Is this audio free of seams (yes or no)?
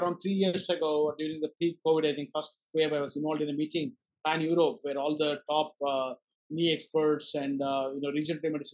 yes